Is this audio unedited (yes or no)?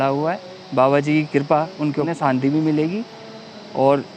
no